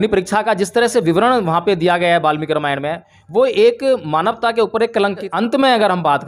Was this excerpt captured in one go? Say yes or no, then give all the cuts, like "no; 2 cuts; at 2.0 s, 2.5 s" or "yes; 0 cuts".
no; 1 cut; at 5.3 s